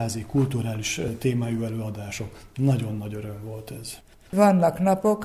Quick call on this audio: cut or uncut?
cut